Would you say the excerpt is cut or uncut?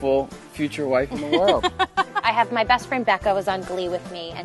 cut